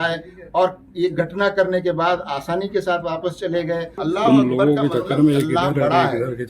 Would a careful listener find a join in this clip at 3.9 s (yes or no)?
yes